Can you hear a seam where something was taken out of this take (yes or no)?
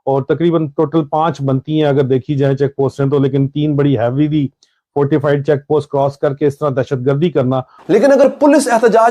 yes